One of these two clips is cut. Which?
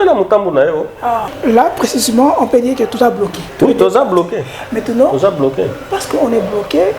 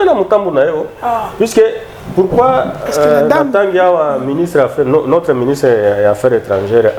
first; 2 cuts; at 1.3 s, 3.4 s

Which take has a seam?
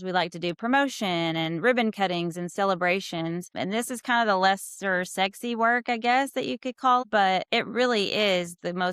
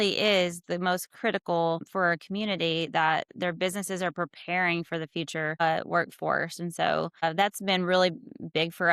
first; 1 cut; at 7.0 s

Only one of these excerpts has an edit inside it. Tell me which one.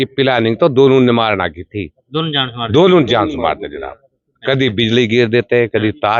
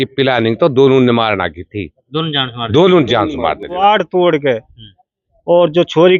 second; 1 cut; at 3.8 s

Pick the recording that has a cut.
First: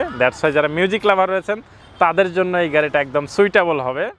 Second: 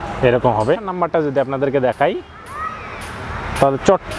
second; 1 cut; at 0.9 s

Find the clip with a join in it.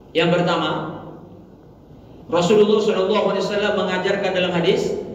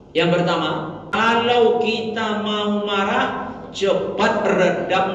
second; 1 cut; at 1.0 s

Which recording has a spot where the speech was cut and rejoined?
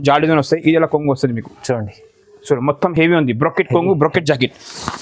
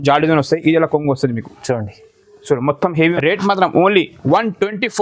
second; 1 cut; at 3.0 s

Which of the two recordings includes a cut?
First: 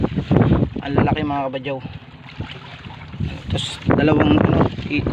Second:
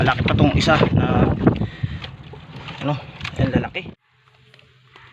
second; 1 cut; at 3.8 s

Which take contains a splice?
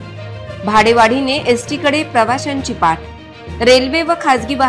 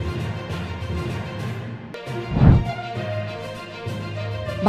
second; 1 cut; at 1.5 s

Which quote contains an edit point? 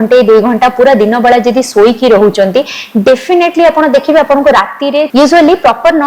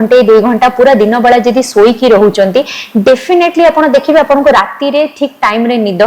first; 1 cut; at 5.1 s

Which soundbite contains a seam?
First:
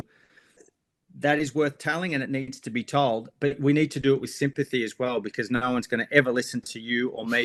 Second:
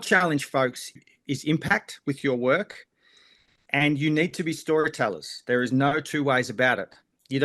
second; 1 cut; at 1.0 s

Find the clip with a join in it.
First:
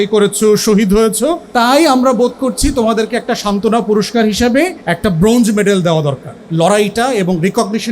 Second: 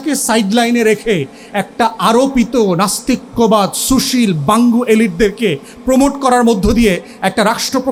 first; 3 cuts; at 1.4 s, 4.8 s, 6.3 s

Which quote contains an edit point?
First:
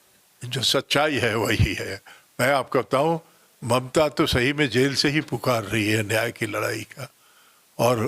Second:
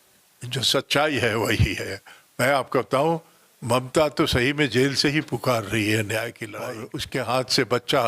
second; 1 cut; at 6.9 s

